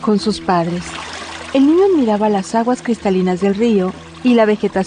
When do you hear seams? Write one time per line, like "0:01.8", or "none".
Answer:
none